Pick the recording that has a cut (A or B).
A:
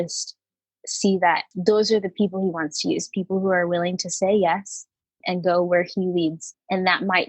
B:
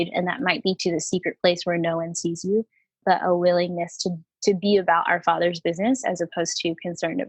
A